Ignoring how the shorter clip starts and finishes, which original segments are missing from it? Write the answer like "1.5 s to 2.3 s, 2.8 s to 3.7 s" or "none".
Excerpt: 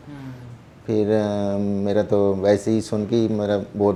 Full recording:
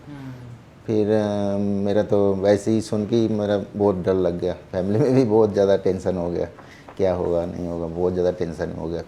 none